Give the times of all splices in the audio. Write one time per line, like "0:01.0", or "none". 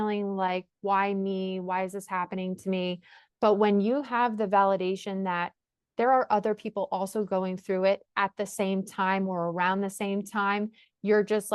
none